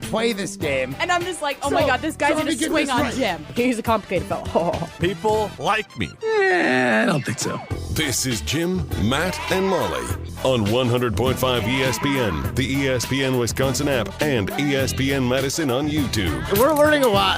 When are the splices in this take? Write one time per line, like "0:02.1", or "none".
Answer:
0:16.4